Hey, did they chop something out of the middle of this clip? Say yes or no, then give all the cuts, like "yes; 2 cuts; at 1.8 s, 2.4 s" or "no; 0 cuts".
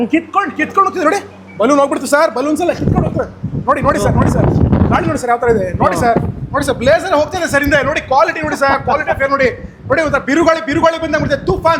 no; 0 cuts